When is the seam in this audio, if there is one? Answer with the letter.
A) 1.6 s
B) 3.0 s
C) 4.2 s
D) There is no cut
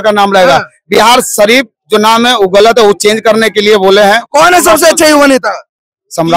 D